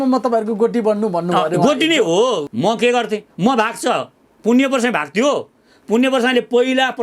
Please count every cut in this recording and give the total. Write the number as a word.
one